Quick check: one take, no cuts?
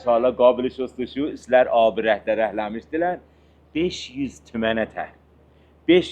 yes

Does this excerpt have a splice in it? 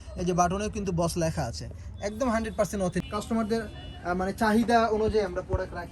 yes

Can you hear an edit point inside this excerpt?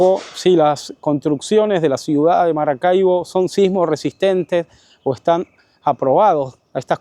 no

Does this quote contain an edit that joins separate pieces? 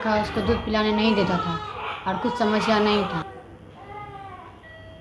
yes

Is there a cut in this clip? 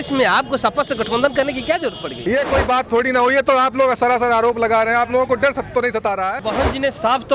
yes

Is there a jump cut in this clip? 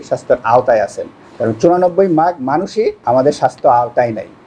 yes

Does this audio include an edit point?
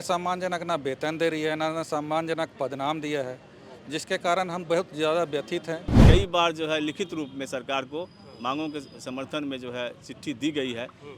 yes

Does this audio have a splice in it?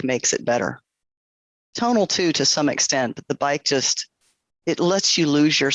no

